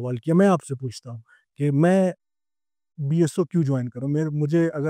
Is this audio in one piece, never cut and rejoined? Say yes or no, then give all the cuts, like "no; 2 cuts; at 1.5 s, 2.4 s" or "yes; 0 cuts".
yes; 0 cuts